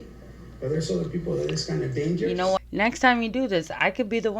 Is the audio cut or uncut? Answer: cut